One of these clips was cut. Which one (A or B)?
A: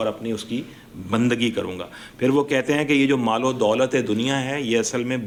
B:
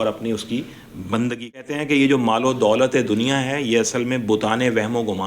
B